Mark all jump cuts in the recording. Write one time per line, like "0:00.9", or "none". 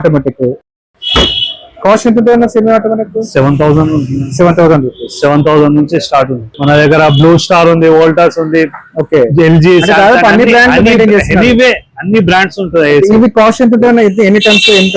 0:06.5